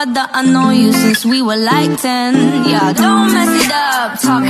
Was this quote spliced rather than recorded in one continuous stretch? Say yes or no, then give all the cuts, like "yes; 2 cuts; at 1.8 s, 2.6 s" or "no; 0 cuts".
no; 0 cuts